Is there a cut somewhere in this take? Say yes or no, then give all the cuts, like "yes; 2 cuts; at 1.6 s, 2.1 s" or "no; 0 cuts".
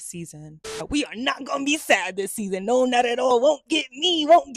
yes; 2 cuts; at 0.8 s, 3.3 s